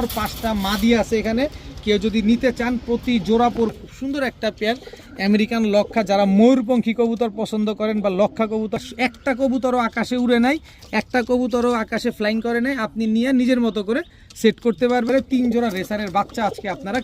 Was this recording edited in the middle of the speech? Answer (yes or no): yes